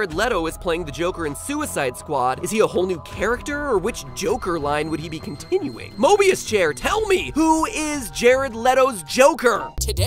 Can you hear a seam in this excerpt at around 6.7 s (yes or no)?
no